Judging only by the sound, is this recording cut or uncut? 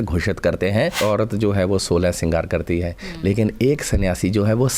cut